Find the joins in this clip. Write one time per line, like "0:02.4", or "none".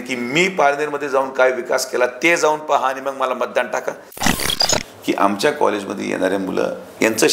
0:04.5